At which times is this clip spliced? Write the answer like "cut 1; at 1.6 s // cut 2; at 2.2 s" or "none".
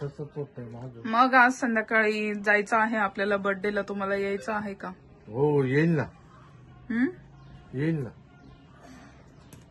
none